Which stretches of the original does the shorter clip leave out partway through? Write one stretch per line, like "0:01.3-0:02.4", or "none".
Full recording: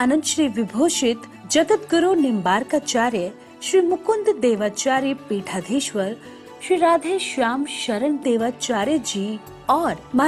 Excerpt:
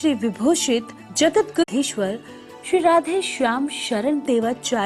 0:02.0-0:05.6